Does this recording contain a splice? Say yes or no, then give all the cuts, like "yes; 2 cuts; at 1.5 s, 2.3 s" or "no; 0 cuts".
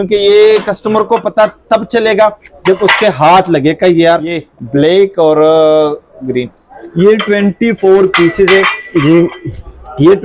yes; 1 cut; at 4.4 s